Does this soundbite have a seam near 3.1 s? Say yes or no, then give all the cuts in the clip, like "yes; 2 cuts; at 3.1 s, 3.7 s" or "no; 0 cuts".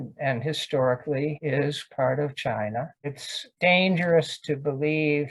yes; 1 cut; at 3.1 s